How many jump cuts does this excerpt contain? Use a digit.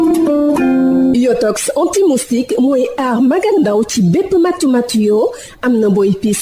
1